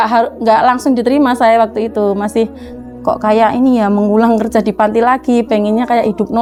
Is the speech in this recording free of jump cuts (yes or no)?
yes